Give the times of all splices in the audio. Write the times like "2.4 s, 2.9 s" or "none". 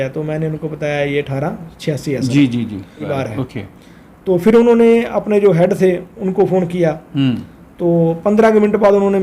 3.1 s